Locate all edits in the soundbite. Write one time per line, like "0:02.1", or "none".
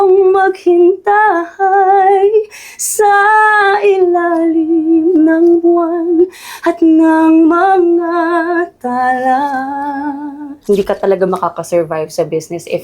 0:10.6